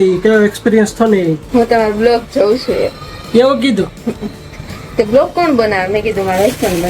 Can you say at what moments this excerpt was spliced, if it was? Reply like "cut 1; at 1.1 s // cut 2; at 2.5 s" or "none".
cut 1; at 1.4 s

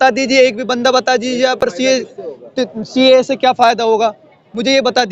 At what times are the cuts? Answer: none

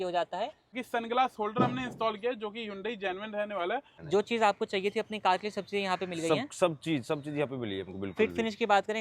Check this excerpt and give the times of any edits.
cut 1; at 0.8 s // cut 2; at 4.0 s

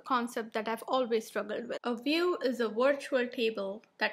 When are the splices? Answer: cut 1; at 1.7 s

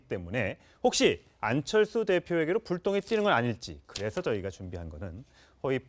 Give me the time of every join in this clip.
none

